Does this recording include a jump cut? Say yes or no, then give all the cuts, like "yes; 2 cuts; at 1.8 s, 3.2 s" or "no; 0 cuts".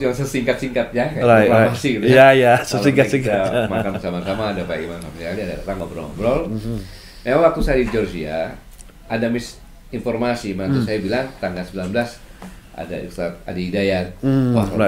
no; 0 cuts